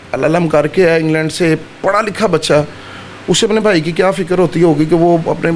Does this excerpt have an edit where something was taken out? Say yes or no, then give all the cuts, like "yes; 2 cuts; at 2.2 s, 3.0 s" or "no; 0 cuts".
no; 0 cuts